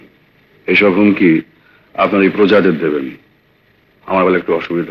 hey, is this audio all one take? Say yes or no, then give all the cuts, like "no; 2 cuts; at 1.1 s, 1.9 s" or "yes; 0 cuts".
yes; 0 cuts